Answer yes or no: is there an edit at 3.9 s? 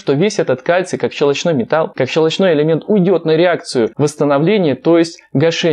yes